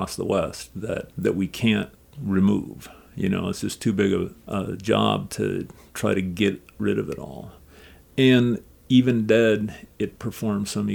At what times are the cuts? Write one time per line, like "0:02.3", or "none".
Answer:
none

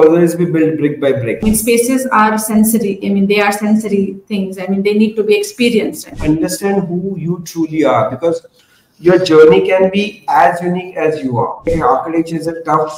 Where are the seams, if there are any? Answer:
0:01.4
0:06.1
0:11.7

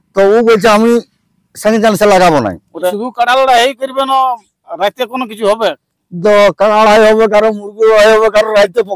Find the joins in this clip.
0:02.9

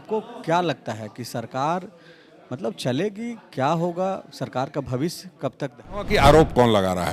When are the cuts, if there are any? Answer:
0:06.1

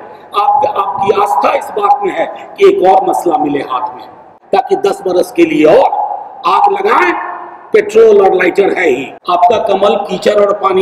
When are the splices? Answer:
0:04.3
0:09.1

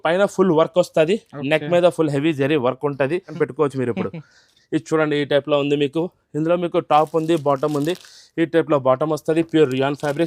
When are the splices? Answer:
0:03.3

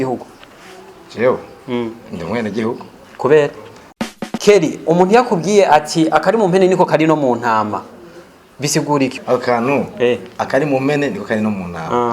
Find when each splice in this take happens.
0:04.2

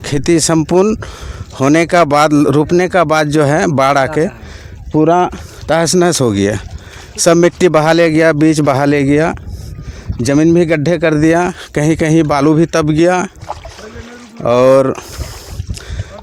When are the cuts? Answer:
none

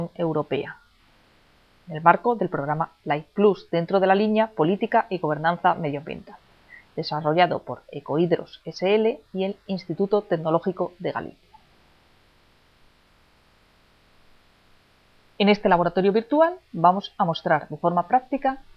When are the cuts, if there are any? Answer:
none

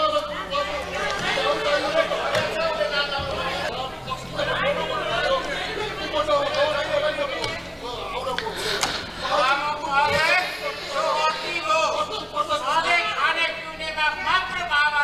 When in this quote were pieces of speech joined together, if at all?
0:03.7

